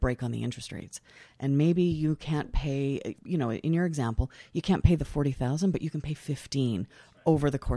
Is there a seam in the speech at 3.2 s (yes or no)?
yes